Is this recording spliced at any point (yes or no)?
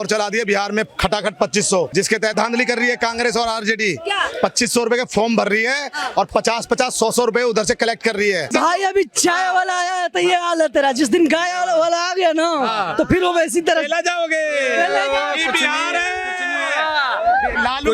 yes